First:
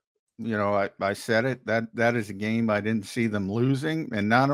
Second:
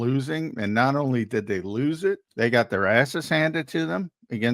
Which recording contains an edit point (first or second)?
second